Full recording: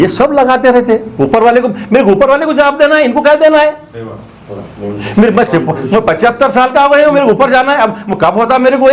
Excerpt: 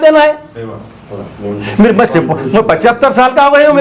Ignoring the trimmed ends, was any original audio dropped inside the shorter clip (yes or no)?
no